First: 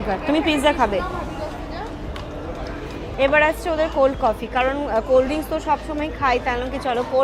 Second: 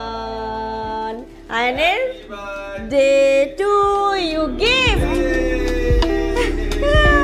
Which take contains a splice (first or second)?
first